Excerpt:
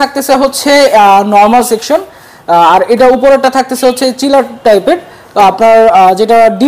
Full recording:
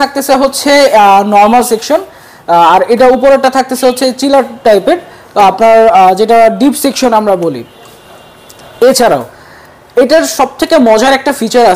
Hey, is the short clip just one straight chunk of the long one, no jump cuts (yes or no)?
yes